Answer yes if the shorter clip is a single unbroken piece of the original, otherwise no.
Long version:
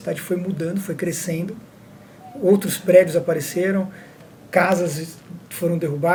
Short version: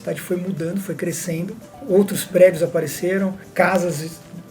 no